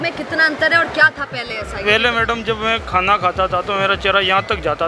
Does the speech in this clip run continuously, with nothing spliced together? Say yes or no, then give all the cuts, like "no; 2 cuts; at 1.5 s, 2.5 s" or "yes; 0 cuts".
yes; 0 cuts